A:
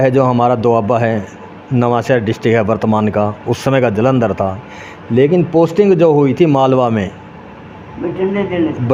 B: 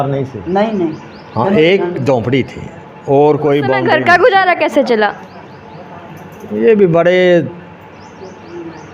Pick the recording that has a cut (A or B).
B